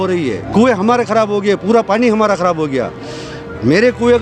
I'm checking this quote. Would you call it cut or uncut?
uncut